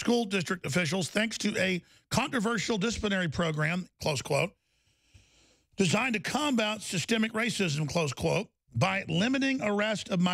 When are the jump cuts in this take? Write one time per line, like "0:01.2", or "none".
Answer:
none